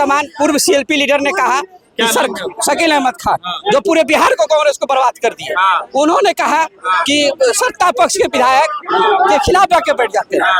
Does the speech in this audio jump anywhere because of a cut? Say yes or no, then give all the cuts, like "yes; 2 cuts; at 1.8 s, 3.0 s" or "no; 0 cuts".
no; 0 cuts